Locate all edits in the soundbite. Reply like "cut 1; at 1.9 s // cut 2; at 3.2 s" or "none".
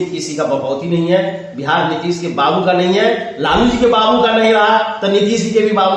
none